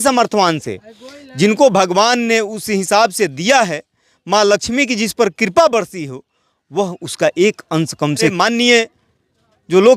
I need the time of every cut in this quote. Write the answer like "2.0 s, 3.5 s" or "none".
8.3 s